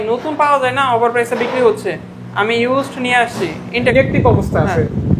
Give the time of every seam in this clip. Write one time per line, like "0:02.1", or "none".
0:03.9